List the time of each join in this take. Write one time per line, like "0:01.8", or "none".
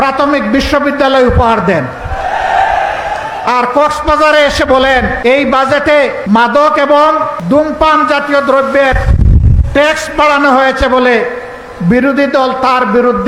0:05.2
0:06.2
0:07.3